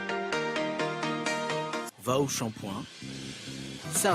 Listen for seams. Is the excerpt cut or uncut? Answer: cut